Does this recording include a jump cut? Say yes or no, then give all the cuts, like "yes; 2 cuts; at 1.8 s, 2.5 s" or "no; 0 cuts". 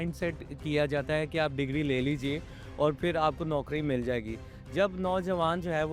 no; 0 cuts